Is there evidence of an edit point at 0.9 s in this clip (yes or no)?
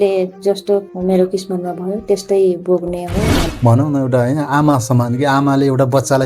yes